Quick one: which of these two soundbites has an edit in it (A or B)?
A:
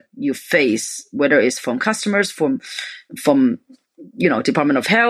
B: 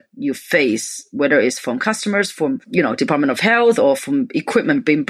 B